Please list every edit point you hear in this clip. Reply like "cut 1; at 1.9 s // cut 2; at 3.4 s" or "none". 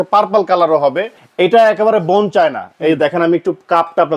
cut 1; at 1.1 s

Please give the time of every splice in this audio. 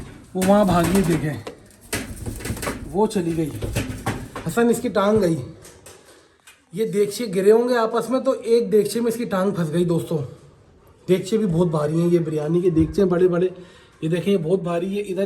none

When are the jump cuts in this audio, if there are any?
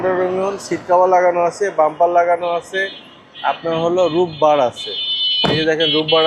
none

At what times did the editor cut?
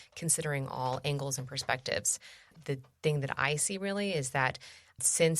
cut 1; at 2.6 s

